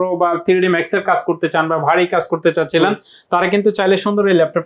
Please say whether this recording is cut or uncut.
uncut